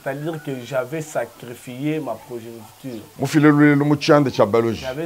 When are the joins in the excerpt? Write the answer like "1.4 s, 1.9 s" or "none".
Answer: none

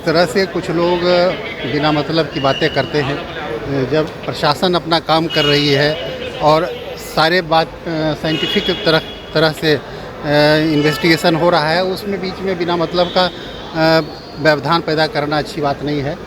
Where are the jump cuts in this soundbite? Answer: none

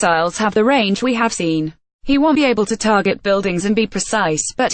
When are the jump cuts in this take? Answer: 1.3 s

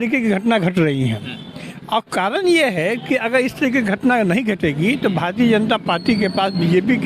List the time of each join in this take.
none

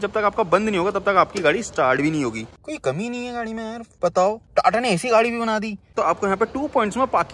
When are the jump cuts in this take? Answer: 2.5 s, 5.9 s

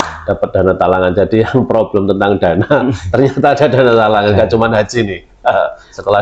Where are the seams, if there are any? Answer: none

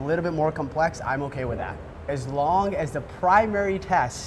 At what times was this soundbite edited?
2.0 s

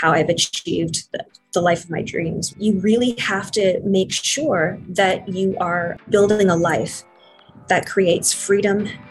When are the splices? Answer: 2.5 s, 6.1 s

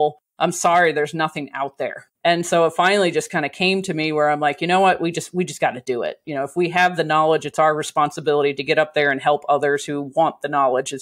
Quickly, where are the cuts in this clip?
2.0 s

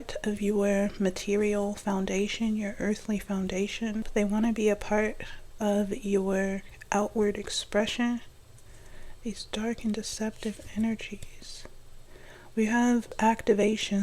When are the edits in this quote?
4.1 s, 13.1 s

